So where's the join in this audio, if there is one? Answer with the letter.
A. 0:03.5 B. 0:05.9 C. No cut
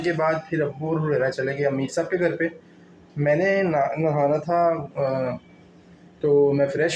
C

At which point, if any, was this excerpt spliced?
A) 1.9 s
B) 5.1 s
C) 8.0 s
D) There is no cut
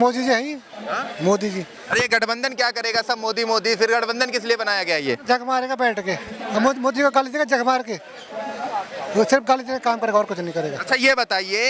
D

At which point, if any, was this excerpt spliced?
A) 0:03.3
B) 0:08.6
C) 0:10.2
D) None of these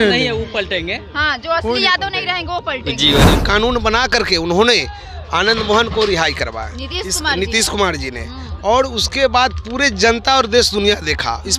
A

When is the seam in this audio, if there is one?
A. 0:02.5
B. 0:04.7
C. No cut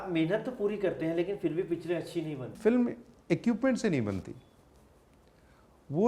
A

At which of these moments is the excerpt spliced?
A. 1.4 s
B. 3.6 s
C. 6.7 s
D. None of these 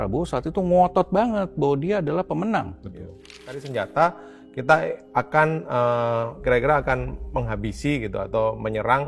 B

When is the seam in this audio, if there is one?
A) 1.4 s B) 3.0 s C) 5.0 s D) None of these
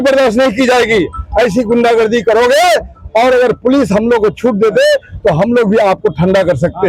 D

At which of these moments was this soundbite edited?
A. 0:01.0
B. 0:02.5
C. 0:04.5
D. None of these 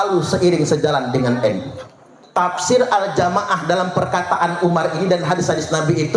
B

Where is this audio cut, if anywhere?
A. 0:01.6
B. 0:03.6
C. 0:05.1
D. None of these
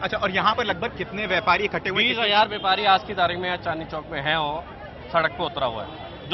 D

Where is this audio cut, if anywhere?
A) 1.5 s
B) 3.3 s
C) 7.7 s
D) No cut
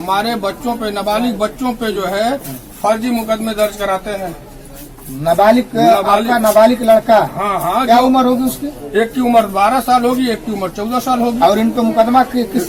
D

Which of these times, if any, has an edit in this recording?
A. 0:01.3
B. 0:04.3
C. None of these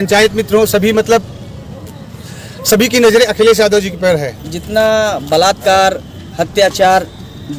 B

